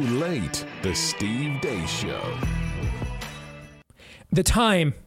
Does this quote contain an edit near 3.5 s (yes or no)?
yes